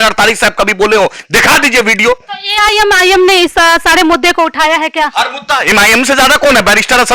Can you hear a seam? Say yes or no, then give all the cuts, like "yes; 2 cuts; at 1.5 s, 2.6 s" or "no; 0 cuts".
no; 0 cuts